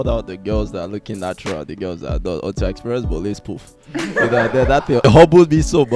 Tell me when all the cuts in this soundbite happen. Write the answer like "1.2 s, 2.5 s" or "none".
5.0 s